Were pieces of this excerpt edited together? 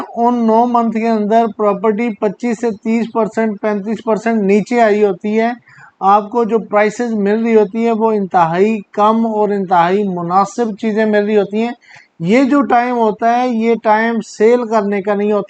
no; 0 cuts

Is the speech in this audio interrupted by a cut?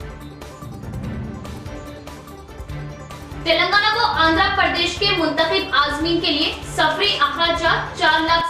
yes; 1 cut; at 1.0 s

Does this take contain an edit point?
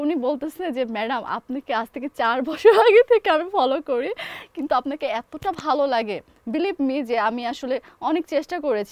no; 0 cuts

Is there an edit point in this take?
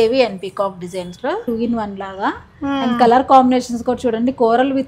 yes; 1 cut; at 1.4 s

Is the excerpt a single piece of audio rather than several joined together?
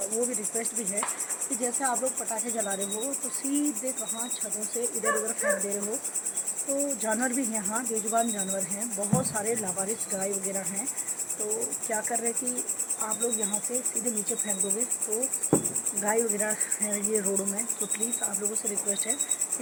yes; 0 cuts

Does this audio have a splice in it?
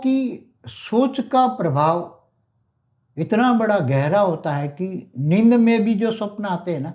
no; 0 cuts

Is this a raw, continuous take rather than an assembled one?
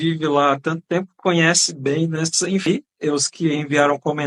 no; 1 cut; at 2.7 s

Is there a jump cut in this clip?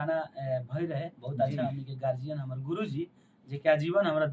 no; 0 cuts

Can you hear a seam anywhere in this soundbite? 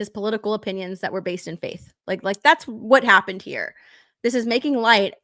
no; 0 cuts

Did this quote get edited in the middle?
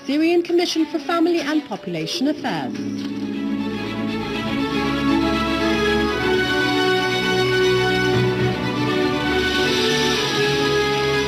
no; 0 cuts

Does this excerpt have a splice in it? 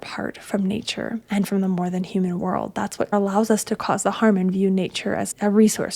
yes; 2 cuts; at 1.2 s, 3.1 s

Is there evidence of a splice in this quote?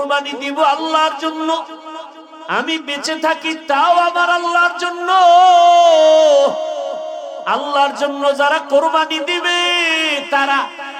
no; 0 cuts

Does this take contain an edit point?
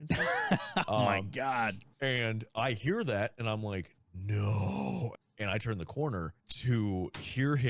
yes; 3 cuts; at 1.9 s, 5.1 s, 6.4 s

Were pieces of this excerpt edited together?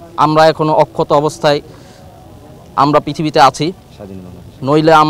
no; 0 cuts

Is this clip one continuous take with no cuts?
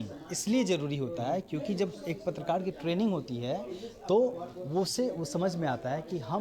yes; 0 cuts

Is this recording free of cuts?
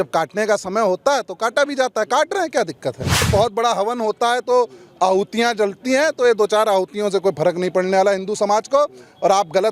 no; 1 cut; at 3.3 s

